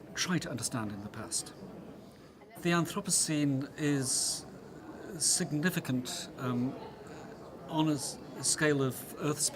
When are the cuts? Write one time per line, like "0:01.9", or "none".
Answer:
0:02.2